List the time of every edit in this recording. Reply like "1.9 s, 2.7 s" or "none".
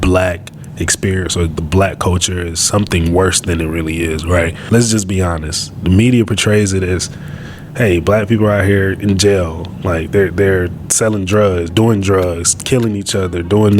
4.6 s